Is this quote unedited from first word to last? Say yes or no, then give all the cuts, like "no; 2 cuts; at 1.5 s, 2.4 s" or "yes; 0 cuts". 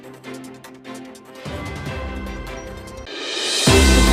no; 1 cut; at 3.0 s